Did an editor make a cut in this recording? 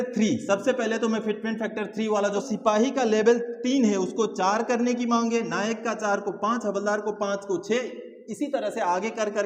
yes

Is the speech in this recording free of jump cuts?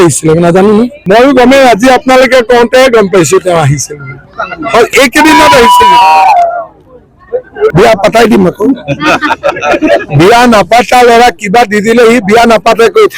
no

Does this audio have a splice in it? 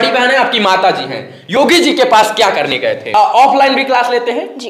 yes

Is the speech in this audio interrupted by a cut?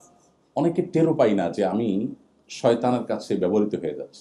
no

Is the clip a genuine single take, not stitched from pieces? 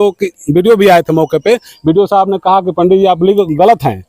yes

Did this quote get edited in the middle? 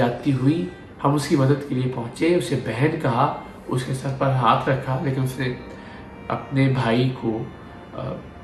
no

